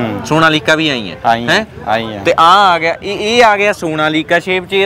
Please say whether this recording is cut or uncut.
uncut